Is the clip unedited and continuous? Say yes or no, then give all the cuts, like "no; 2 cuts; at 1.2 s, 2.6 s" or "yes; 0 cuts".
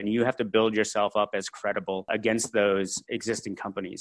no; 2 cuts; at 2.1 s, 3.0 s